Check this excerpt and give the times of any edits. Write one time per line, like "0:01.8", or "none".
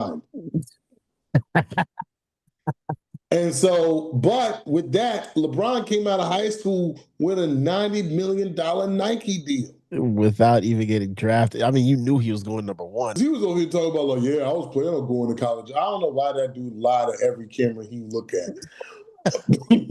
0:13.2